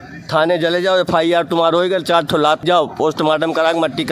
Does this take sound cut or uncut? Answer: cut